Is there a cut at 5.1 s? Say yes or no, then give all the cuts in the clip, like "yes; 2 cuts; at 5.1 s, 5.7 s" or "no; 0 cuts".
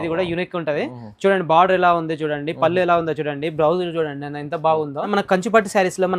yes; 1 cut; at 5.1 s